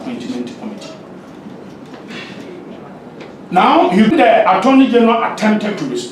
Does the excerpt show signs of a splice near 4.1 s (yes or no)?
yes